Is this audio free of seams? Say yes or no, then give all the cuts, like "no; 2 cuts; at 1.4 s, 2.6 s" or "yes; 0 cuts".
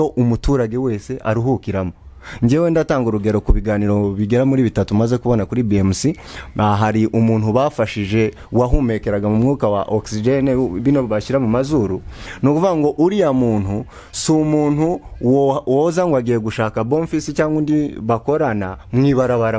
yes; 0 cuts